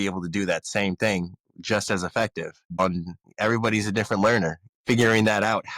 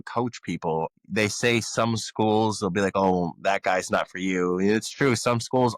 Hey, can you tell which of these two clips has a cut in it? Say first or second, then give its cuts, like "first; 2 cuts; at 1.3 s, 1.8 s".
first; 2 cuts; at 2.9 s, 4.8 s